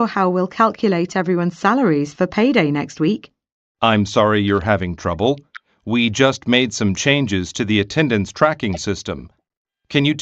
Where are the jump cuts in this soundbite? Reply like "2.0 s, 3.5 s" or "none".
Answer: 6.1 s